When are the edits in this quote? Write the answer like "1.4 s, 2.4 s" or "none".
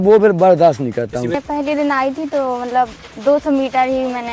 1.3 s